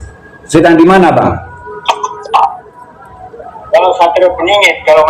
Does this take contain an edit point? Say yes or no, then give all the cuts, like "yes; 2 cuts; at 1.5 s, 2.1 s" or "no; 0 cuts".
yes; 1 cut; at 2.1 s